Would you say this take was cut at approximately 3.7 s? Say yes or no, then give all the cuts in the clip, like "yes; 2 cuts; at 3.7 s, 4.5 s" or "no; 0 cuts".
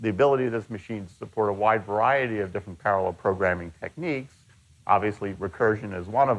yes; 1 cut; at 3.7 s